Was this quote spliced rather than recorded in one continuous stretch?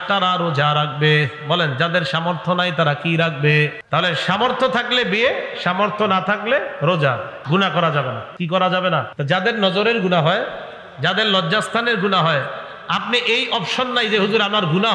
yes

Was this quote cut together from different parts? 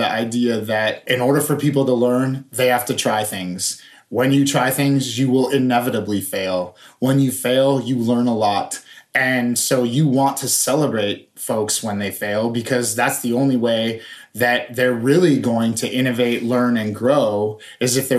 no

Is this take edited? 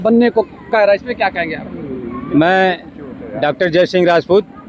no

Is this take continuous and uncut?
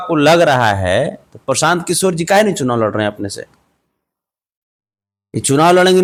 yes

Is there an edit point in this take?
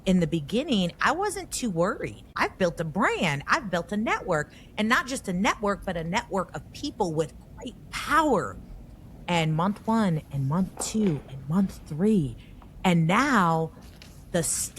yes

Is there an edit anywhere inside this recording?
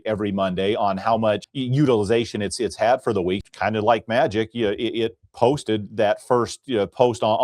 yes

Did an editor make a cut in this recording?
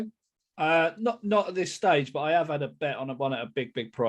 no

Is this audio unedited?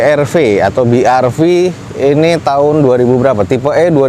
yes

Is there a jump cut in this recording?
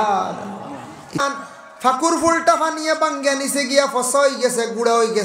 yes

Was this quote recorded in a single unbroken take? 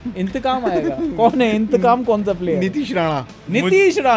yes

